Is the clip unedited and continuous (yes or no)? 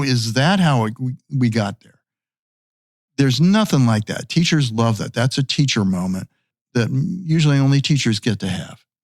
no